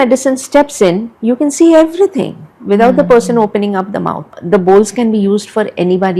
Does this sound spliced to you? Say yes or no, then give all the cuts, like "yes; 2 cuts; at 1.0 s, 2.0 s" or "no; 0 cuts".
yes; 2 cuts; at 1.1 s, 4.3 s